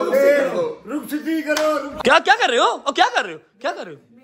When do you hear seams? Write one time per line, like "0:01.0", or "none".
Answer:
0:01.9